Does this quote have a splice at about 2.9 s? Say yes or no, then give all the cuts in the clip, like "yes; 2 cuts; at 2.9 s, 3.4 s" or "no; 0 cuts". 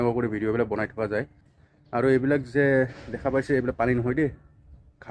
no; 1 cut; at 1.4 s